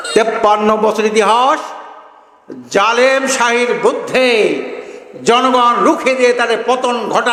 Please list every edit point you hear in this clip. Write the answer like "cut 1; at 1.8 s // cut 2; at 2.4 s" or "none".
none

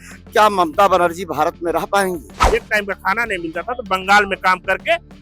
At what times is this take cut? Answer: cut 1; at 2.3 s

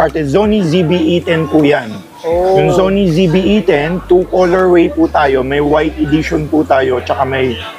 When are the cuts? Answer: none

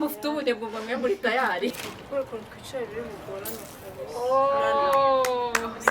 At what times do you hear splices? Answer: cut 1; at 1.8 s

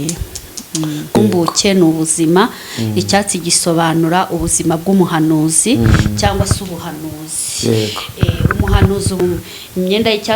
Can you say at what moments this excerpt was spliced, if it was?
cut 1; at 1.2 s // cut 2; at 9.2 s

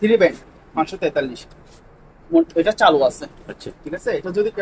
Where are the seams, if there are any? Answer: none

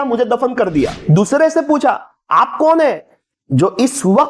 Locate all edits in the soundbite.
cut 1; at 1.0 s

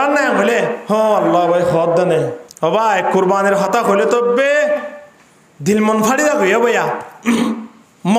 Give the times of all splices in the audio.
cut 1; at 0.8 s // cut 2; at 2.4 s

